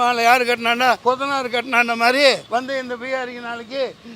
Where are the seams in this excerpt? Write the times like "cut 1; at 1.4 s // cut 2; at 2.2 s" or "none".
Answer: cut 1; at 1.0 s // cut 2; at 2.4 s